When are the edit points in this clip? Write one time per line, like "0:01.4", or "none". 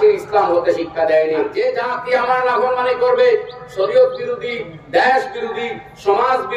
0:01.5